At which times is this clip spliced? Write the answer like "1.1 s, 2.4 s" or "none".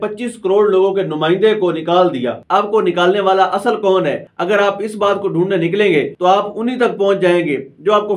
2.4 s, 4.3 s, 6.1 s